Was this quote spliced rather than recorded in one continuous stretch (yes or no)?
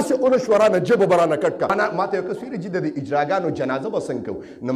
yes